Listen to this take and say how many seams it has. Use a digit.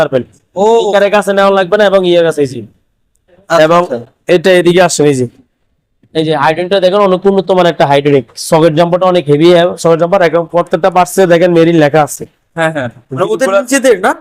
0